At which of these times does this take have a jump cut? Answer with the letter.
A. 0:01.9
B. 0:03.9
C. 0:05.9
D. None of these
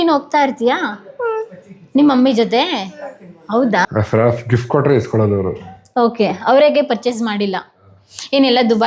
B